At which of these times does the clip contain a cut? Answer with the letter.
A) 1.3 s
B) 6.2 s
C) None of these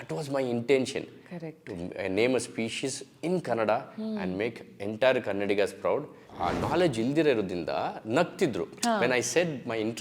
B